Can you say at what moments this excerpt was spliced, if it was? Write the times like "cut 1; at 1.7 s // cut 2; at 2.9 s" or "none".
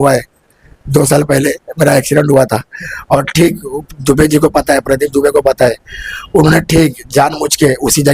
none